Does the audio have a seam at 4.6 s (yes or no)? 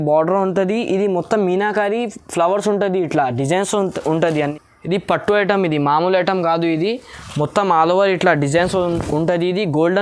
yes